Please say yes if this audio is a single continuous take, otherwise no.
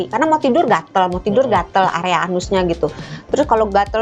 yes